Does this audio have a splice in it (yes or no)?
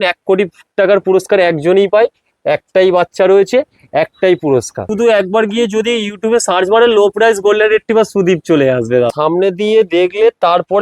yes